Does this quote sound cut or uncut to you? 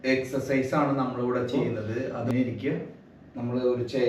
cut